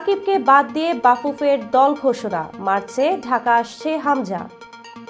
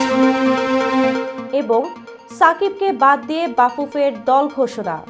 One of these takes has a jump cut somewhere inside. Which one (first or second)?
second